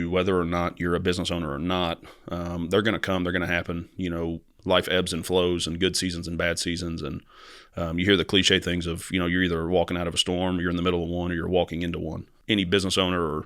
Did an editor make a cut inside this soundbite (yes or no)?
yes